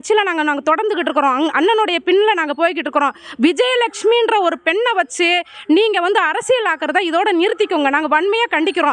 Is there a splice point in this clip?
no; 0 cuts

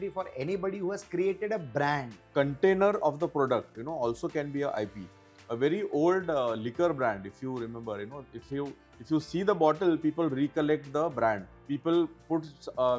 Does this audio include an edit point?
yes; 2 cuts; at 2.2 s, 11.5 s

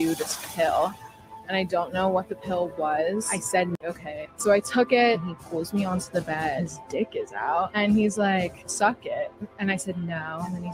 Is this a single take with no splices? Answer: no; 1 cut; at 3.8 s

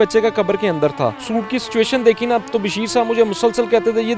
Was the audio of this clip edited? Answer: yes; 1 cut; at 1.2 s

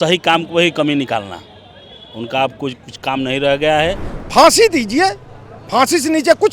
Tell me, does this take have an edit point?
yes; 1 cut; at 4.1 s

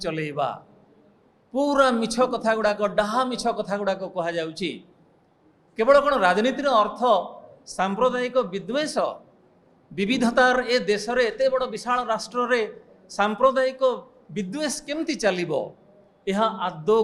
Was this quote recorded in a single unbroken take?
yes; 0 cuts

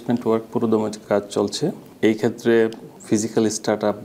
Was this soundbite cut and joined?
yes; 3 cuts; at 1.0 s, 1.9 s, 2.9 s

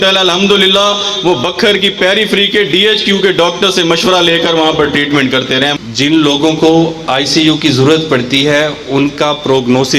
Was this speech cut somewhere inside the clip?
yes; 1 cut; at 5.7 s

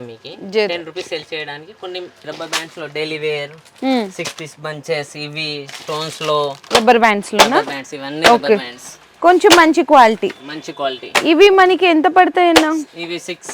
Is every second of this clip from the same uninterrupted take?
no; 2 cuts; at 2.2 s, 6.6 s

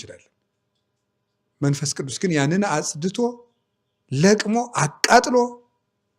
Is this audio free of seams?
yes; 0 cuts

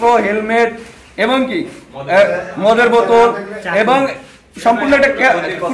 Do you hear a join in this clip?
no; 0 cuts

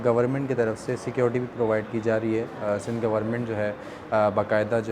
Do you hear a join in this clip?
no; 0 cuts

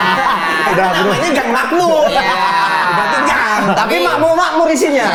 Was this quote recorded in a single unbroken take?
yes; 0 cuts

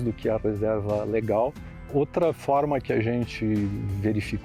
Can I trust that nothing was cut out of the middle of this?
yes; 0 cuts

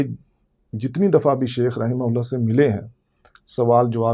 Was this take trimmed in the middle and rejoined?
no; 0 cuts

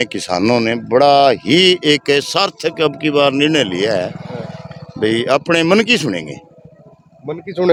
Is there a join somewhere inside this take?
no; 0 cuts

